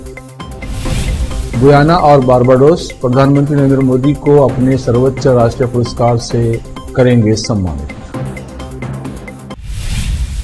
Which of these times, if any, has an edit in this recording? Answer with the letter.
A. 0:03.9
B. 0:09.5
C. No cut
B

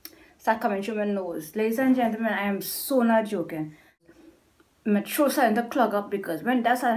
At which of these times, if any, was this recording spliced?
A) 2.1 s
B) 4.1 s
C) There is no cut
B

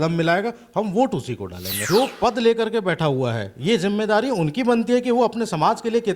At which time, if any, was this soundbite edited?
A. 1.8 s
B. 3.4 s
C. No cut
A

